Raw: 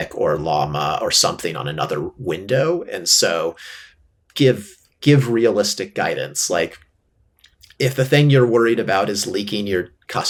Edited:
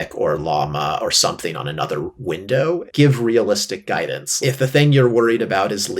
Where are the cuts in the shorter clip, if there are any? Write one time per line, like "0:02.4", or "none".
0:02.9
0:04.2

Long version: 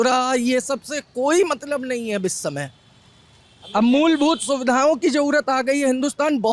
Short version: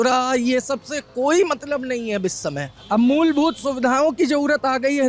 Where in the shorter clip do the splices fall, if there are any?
0:02.7

